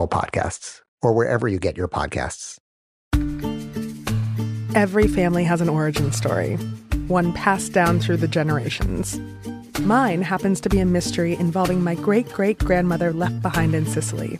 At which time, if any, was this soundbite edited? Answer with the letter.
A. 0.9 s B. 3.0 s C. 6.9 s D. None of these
B